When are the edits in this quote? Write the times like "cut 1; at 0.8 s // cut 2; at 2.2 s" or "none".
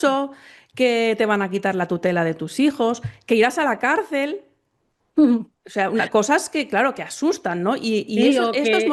none